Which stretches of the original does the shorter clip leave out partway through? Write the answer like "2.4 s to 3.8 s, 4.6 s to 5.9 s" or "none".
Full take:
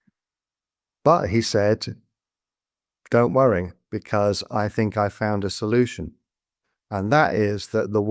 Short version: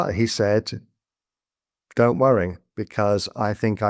none